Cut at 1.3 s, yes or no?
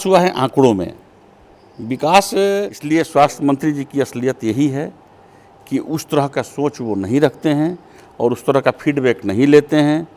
no